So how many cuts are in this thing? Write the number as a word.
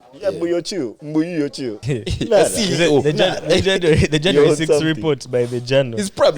two